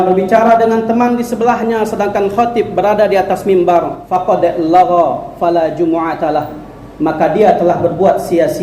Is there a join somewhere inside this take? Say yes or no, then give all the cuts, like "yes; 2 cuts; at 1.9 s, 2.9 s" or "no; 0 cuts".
yes; 1 cut; at 4.0 s